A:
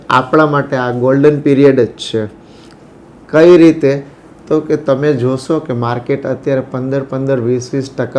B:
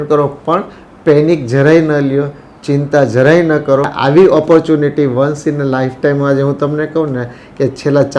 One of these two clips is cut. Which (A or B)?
B